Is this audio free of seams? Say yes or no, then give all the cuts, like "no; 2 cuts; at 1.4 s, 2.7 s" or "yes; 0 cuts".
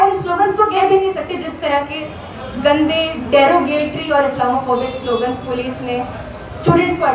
yes; 0 cuts